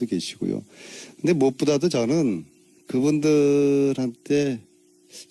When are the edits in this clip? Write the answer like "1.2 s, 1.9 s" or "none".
none